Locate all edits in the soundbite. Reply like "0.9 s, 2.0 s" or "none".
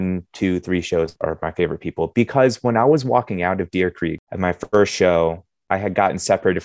1.1 s, 4.2 s